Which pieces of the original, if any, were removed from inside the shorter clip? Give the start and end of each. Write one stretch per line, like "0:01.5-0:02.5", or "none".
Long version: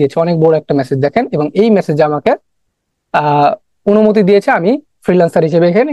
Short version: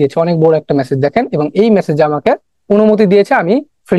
0:02.5-0:03.7